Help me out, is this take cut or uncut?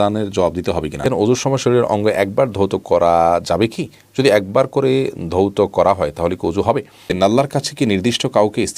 cut